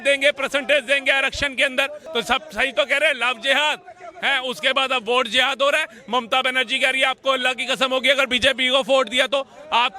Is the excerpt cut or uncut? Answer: cut